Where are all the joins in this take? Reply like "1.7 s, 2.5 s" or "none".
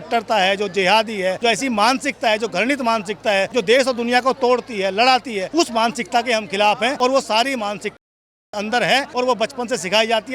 1.4 s, 3.5 s, 5.4 s, 7.0 s, 9.1 s